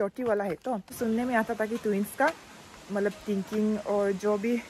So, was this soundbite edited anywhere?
yes; 1 cut; at 0.9 s

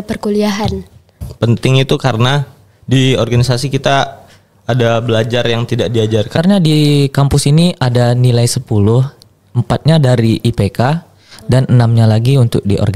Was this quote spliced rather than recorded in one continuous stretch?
yes; 2 cuts; at 1.2 s, 6.4 s

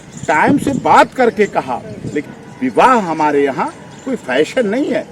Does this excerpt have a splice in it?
yes; 1 cut; at 2.2 s

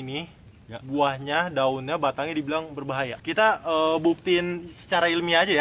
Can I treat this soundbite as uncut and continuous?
no; 1 cut; at 3.2 s

